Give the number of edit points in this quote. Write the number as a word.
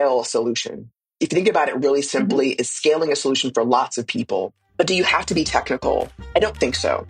two